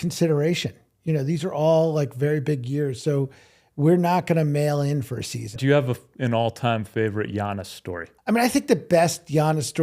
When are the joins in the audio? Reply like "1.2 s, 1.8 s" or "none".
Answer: 5.6 s, 8.1 s